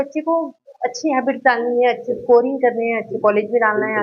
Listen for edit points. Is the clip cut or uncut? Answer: uncut